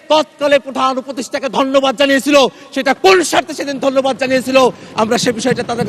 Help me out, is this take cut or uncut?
uncut